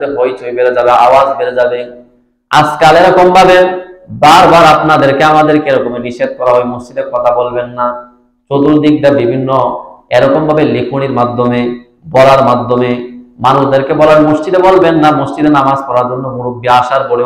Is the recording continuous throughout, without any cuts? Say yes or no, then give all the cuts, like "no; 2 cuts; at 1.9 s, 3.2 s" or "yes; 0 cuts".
yes; 0 cuts